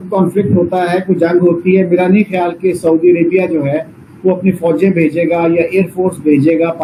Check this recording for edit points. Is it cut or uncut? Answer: uncut